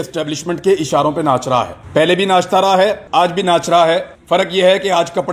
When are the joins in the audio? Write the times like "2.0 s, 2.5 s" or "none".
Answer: 1.8 s, 3.0 s, 4.1 s